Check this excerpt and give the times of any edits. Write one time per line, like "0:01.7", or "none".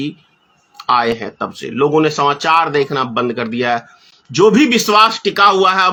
none